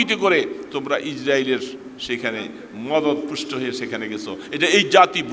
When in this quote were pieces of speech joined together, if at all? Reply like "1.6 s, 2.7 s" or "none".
none